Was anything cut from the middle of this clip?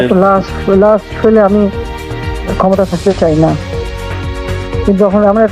no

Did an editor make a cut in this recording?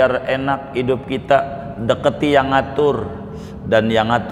no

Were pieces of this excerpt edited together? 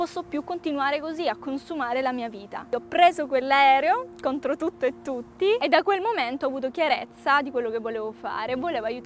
yes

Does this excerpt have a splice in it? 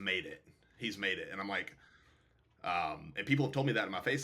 no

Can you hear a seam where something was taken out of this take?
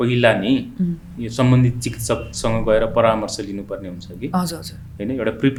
no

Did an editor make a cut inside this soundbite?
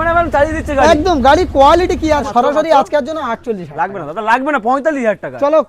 yes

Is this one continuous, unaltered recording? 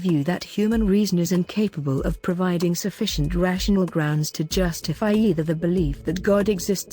yes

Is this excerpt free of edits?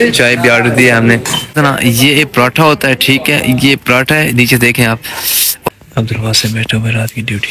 no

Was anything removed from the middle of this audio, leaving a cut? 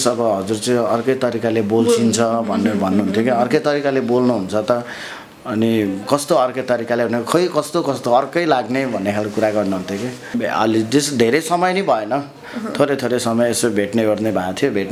yes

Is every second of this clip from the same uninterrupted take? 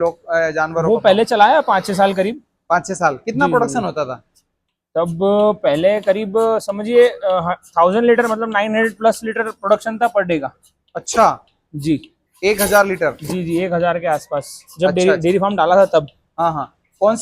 yes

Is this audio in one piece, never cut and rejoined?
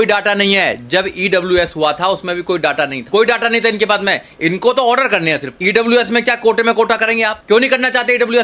no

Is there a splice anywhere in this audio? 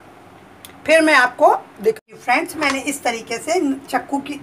yes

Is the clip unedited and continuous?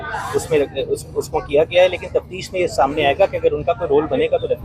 yes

